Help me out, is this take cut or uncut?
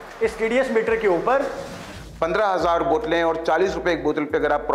cut